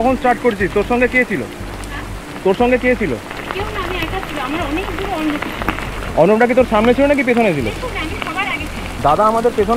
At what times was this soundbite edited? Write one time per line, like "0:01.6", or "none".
none